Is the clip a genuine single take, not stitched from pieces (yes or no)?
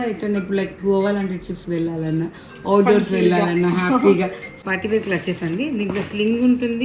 no